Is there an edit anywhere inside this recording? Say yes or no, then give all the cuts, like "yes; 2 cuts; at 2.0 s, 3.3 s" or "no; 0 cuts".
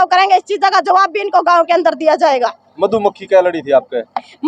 no; 0 cuts